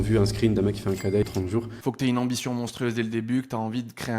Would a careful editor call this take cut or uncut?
cut